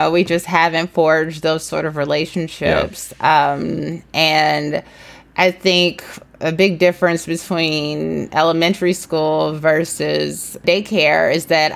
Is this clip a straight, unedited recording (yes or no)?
yes